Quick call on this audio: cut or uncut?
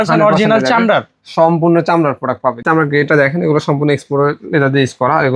cut